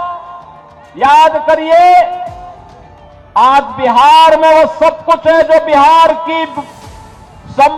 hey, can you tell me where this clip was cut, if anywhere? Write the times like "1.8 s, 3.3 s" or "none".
none